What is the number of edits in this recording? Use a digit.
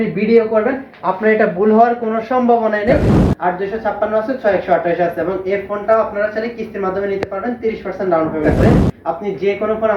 2